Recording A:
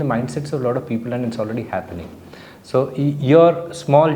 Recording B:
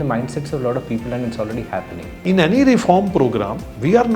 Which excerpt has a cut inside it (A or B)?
B